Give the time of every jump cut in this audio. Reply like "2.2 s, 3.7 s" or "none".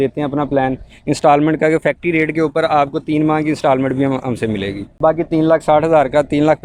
4.8 s